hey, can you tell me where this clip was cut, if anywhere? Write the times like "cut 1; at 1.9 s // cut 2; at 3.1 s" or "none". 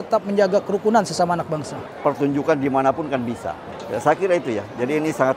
cut 1; at 1.8 s